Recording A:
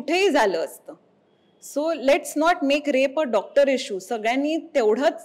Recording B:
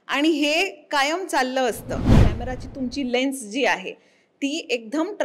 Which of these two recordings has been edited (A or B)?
B